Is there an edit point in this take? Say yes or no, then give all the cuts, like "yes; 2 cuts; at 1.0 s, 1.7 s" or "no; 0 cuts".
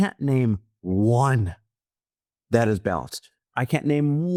no; 0 cuts